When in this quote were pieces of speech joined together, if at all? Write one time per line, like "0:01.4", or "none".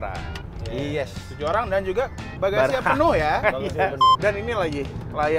0:04.1